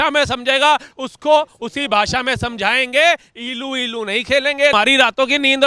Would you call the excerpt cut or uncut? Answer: cut